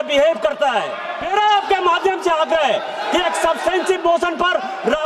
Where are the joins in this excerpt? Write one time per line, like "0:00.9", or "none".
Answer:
0:01.2